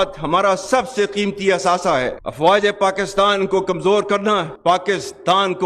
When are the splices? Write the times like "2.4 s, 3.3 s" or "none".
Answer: 2.1 s